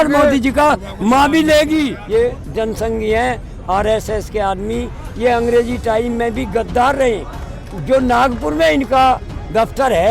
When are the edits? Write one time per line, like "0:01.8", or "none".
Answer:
0:02.0